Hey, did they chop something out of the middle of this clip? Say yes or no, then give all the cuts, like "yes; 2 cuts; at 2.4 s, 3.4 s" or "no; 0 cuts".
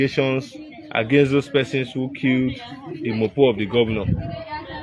no; 0 cuts